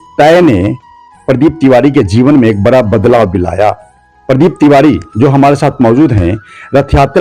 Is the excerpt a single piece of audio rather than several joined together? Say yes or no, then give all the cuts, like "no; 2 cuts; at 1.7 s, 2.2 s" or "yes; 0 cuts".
yes; 0 cuts